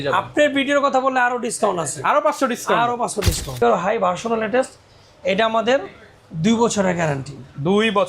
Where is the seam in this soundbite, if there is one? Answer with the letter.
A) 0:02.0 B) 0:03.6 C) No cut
B